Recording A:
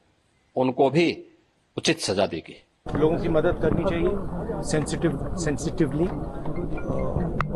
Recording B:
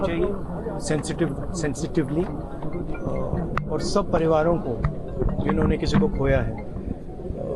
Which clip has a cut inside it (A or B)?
A